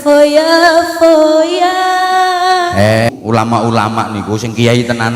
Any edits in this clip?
yes; 1 cut; at 3.1 s

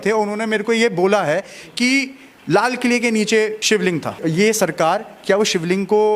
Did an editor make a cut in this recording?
yes; 1 cut; at 4.2 s

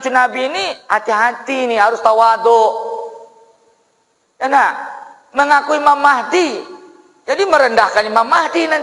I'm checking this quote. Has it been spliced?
no; 0 cuts

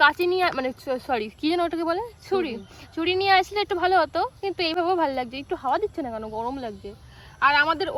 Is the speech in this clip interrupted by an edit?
no; 0 cuts

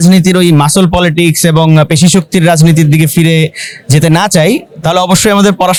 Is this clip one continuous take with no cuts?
yes; 0 cuts

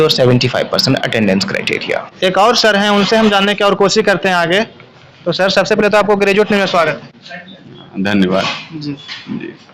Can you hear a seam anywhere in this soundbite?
no; 0 cuts

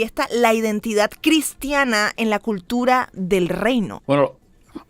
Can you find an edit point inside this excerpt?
yes; 2 cuts; at 1.1 s, 4.0 s

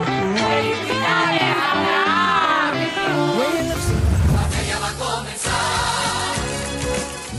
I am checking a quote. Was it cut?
yes; 1 cut; at 4.2 s

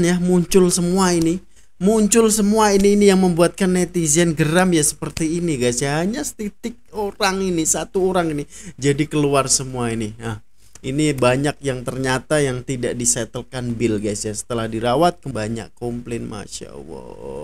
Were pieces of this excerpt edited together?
yes; 1 cut; at 15.2 s

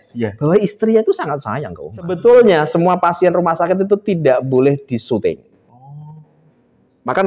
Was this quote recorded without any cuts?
no; 1 cut; at 2.2 s

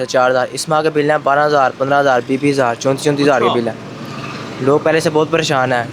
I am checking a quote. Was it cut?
no; 0 cuts

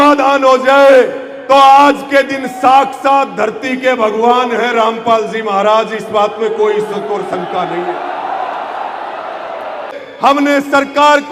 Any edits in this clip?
yes; 1 cut; at 10.0 s

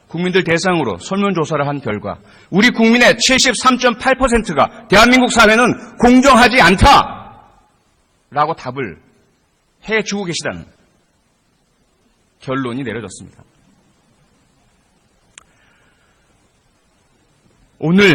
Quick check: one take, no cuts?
yes; 0 cuts

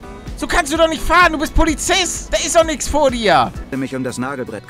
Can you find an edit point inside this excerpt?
yes; 2 cuts; at 2.1 s, 3.7 s

